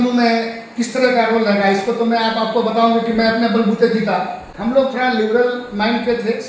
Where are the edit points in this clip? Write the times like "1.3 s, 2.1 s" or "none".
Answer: 4.5 s